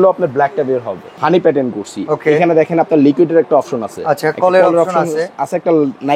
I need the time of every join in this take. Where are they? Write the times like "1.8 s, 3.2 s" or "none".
1.1 s